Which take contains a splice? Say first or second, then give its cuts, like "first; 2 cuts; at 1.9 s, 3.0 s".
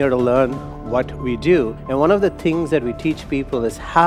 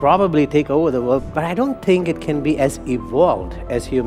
second; 1 cut; at 1.2 s